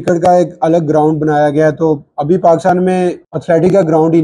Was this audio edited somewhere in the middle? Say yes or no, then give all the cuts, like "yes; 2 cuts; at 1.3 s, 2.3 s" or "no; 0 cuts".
yes; 1 cut; at 3.3 s